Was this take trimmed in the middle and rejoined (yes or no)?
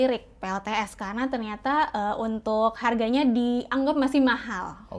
no